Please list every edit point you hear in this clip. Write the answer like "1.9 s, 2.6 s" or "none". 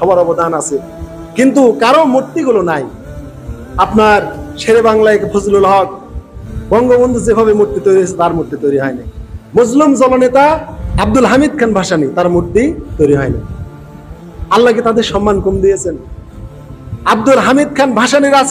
10.8 s